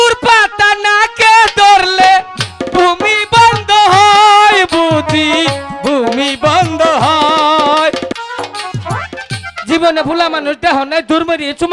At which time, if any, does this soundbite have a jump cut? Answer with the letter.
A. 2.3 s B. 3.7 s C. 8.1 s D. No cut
C